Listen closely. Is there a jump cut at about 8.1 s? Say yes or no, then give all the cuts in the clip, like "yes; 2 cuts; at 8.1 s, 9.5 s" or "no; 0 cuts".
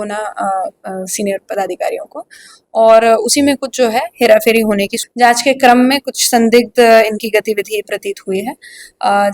no; 1 cut; at 5.0 s